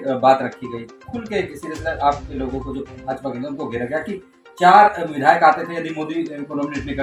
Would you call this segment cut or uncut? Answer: uncut